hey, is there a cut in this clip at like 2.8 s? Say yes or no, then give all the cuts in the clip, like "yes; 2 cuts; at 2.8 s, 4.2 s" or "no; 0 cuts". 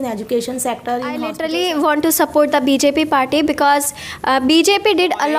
no; 1 cut; at 1.3 s